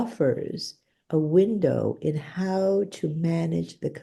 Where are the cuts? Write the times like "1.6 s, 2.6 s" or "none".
none